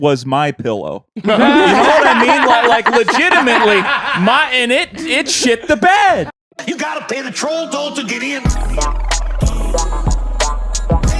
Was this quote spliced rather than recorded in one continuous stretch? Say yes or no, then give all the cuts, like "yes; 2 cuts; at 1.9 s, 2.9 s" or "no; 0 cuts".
yes; 1 cut; at 6.2 s